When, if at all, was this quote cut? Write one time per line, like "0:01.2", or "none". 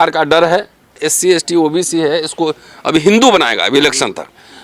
0:01.0